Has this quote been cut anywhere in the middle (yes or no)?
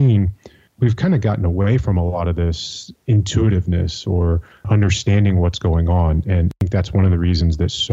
yes